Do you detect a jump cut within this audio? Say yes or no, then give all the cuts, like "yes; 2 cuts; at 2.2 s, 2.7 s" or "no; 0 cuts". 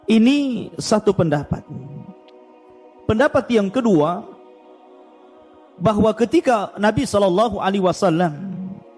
yes; 2 cuts; at 4.3 s, 5.8 s